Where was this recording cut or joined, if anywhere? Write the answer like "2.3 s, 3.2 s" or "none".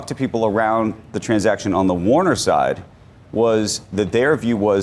none